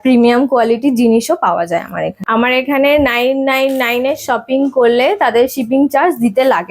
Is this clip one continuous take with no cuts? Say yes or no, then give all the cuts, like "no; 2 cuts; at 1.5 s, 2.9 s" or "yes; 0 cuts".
no; 1 cut; at 2.2 s